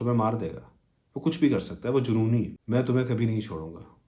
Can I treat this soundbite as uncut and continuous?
no; 1 cut; at 2.6 s

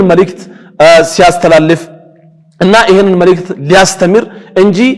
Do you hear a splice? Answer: no; 0 cuts

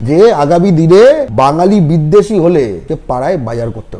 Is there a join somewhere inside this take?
yes; 2 cuts; at 1.3 s, 2.8 s

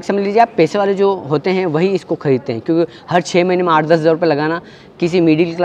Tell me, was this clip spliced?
no; 0 cuts

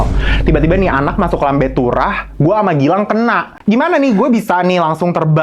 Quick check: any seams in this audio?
yes; 1 cut; at 3.5 s

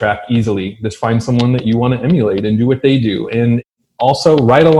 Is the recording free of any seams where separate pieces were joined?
no; 1 cut; at 3.7 s

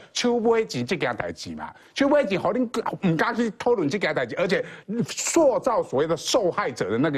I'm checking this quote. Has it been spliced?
no; 0 cuts

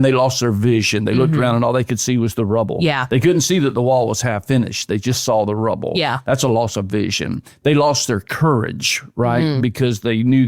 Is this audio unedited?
yes; 0 cuts

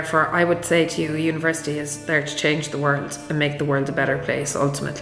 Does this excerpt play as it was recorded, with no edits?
yes; 0 cuts

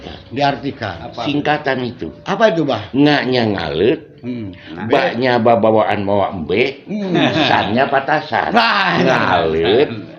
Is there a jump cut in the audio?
no; 0 cuts

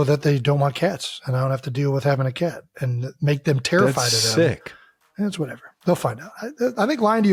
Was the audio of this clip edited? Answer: no; 0 cuts

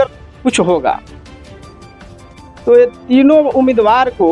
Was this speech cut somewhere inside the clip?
yes; 2 cuts; at 1.0 s, 2.6 s

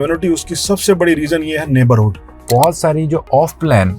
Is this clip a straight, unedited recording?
no; 1 cut; at 2.2 s

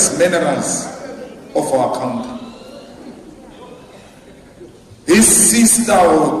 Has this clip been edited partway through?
no; 0 cuts

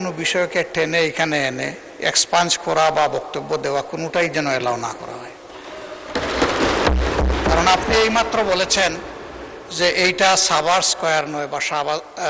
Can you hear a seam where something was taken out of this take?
no; 0 cuts

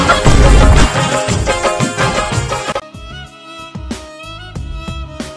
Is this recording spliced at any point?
yes; 1 cut; at 2.9 s

